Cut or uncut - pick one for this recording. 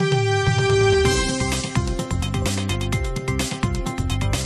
uncut